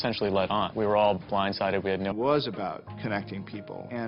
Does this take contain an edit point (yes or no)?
no